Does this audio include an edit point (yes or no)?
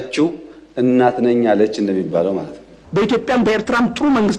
yes